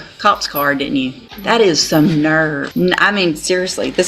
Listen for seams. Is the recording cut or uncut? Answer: cut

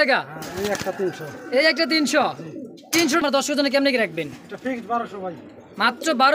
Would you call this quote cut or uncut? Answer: cut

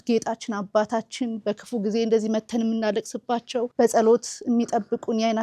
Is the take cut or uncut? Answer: cut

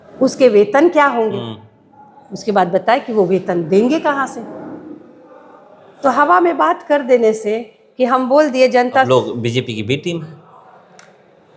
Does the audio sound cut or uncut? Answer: cut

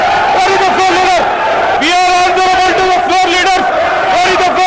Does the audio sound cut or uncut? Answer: cut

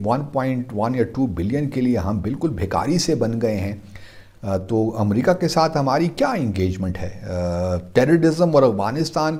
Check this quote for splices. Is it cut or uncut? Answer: uncut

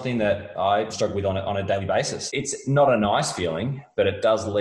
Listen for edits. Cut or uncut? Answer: cut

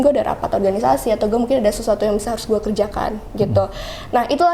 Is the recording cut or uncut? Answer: uncut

